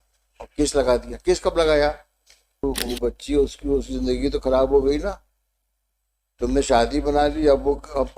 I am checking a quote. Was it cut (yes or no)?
yes